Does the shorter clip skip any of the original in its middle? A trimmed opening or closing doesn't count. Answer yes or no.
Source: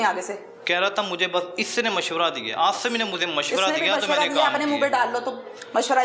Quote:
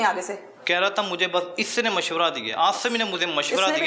no